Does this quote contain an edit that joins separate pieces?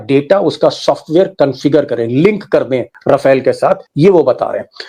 no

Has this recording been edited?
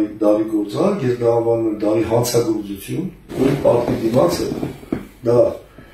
yes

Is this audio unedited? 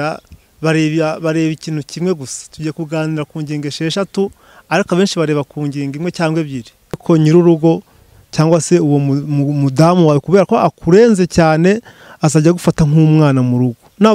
no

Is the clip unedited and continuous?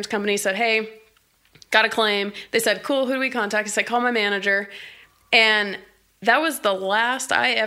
yes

